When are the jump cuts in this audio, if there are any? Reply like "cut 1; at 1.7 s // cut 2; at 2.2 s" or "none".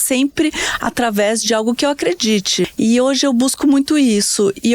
cut 1; at 2.7 s